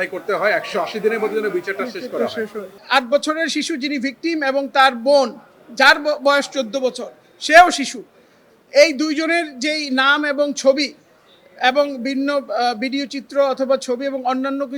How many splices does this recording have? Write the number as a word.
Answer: one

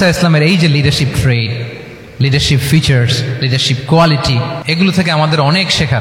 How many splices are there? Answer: one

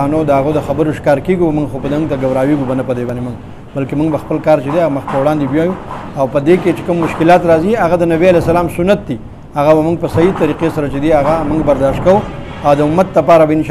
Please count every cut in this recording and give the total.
zero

